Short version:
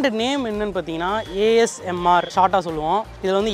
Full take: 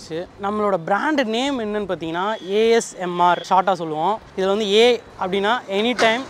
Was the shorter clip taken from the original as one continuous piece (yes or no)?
yes